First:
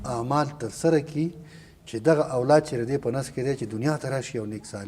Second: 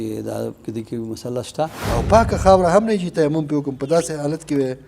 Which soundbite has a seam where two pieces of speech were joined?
second; 1 cut; at 1.8 s

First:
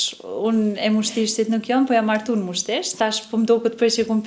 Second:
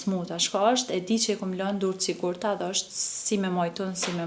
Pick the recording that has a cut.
first; 1 cut; at 2.9 s

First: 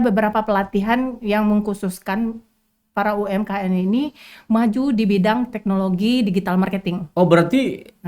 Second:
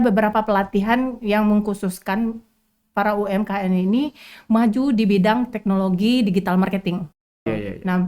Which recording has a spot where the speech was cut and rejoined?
second; 1 cut; at 7.2 s

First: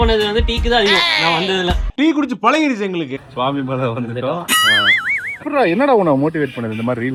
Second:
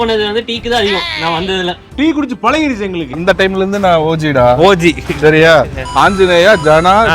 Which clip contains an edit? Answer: second; 1 cut; at 3.1 s

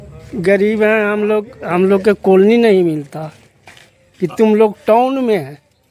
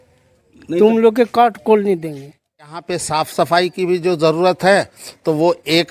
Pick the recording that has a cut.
second; 1 cut; at 2.8 s

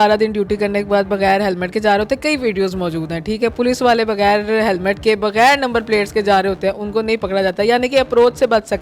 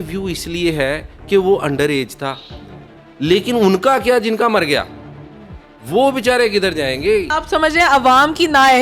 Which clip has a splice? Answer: second; 1 cut; at 7.3 s

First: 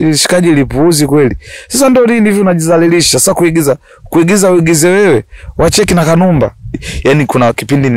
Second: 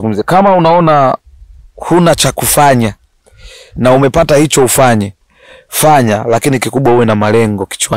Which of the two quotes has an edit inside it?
first; 1 cut; at 6.8 s

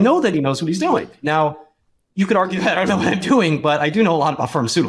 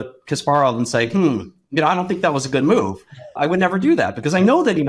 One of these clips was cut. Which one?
second; 1 cut; at 3.3 s

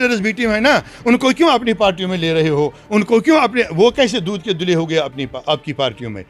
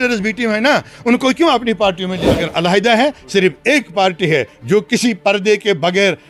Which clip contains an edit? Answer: second; 1 cut; at 2.2 s

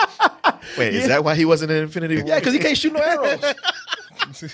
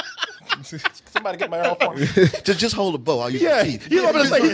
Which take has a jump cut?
first; 1 cut; at 2.2 s

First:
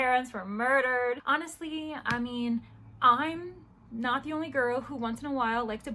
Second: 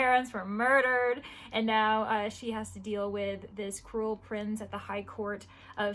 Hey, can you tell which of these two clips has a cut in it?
first; 1 cut; at 1.2 s

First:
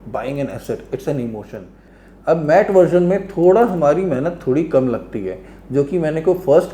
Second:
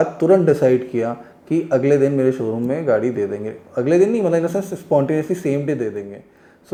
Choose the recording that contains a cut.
first; 1 cut; at 1.9 s

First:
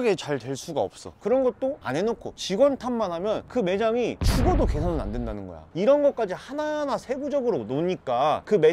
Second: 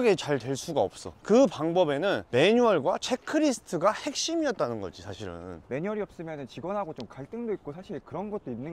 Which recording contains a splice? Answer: first; 2 cuts; at 1.1 s, 5.6 s

